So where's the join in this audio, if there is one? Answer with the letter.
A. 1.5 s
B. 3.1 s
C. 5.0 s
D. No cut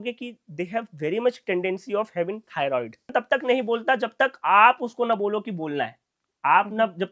B